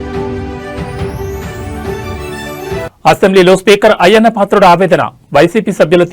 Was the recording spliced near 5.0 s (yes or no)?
no